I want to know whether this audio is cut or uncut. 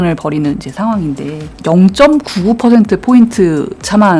uncut